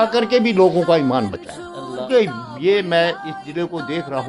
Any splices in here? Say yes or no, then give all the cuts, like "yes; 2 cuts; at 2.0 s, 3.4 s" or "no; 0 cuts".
yes; 1 cut; at 2.0 s